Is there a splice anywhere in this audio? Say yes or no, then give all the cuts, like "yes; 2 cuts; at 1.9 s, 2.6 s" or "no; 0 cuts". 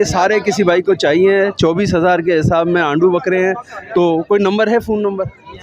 no; 0 cuts